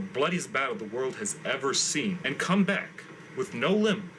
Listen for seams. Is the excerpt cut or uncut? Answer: cut